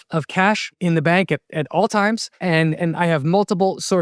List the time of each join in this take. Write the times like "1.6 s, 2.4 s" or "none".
2.4 s